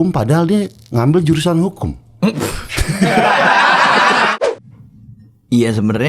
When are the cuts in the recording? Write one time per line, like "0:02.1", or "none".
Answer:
0:04.3

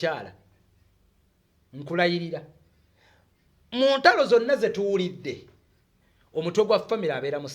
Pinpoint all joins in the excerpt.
none

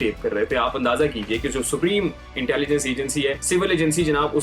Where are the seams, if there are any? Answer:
0:03.4

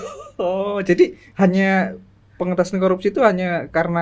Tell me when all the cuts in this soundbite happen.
none

